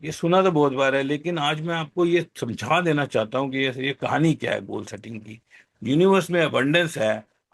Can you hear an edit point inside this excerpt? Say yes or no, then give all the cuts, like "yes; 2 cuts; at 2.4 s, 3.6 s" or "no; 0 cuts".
yes; 1 cut; at 5.6 s